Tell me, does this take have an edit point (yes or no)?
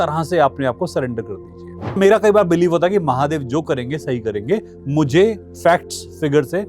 yes